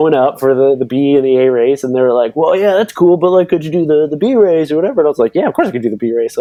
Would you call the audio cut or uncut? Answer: uncut